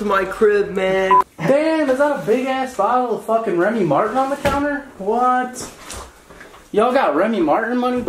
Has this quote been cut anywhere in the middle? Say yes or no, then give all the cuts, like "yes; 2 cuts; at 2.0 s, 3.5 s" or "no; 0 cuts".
yes; 1 cut; at 1.3 s